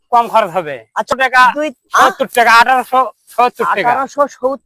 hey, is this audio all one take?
no; 1 cut; at 1.1 s

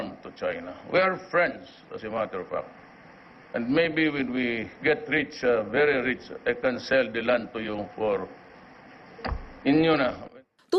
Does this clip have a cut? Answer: no; 0 cuts

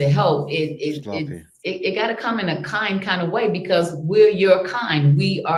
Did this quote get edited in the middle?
no; 0 cuts

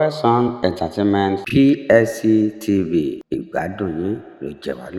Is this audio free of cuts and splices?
yes; 0 cuts

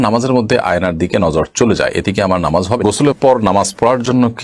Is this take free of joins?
no; 1 cut; at 2.8 s

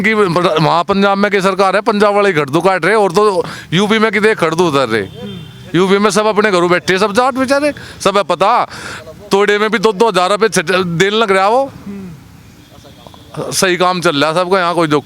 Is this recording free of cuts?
yes; 0 cuts

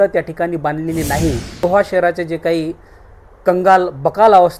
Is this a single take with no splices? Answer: no; 1 cut; at 1.6 s

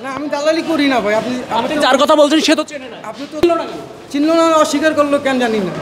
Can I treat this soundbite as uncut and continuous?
no; 1 cut; at 3.4 s

